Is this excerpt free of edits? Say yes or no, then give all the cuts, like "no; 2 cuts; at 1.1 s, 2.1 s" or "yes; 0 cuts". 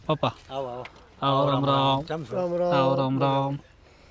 yes; 0 cuts